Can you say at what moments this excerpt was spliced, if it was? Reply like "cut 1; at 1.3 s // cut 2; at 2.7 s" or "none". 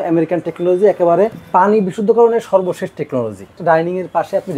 cut 1; at 1.4 s // cut 2; at 3.6 s